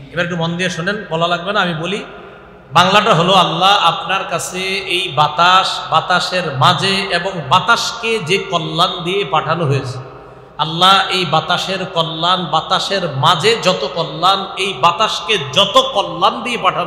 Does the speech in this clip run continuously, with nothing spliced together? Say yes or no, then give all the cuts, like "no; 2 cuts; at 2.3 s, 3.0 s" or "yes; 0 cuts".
yes; 0 cuts